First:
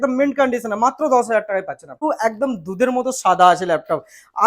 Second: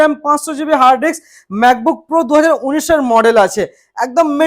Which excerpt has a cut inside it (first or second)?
first